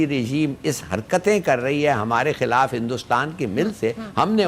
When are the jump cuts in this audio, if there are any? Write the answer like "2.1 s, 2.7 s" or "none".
none